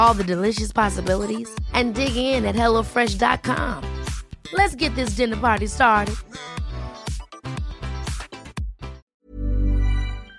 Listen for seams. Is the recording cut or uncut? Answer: cut